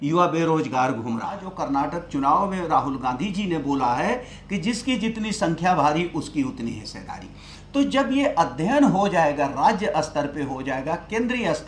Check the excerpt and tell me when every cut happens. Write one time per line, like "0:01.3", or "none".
0:01.5